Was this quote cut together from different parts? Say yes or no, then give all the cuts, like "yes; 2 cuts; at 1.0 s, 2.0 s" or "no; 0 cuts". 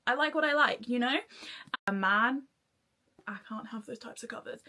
yes; 1 cut; at 1.7 s